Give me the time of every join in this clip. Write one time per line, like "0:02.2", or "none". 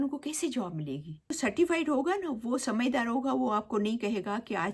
0:01.4